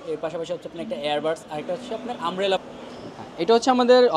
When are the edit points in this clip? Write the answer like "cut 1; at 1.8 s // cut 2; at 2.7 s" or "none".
cut 1; at 2.6 s